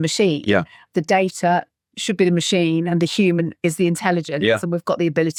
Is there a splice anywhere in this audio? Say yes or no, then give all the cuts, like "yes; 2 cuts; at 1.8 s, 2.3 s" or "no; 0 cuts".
no; 0 cuts